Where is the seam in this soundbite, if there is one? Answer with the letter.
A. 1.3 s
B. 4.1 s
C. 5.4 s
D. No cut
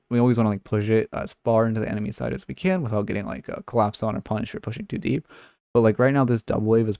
D